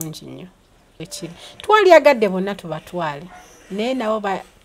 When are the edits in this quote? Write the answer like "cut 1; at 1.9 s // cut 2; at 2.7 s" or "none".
cut 1; at 1.0 s